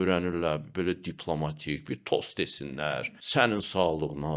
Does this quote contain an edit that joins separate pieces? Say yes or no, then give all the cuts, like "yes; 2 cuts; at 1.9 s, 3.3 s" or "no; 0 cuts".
yes; 1 cut; at 3.0 s